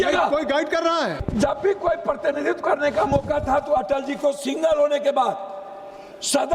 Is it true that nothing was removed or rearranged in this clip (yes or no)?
no